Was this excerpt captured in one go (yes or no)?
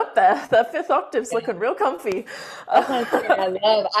yes